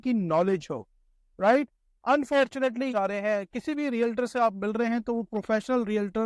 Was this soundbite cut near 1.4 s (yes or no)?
no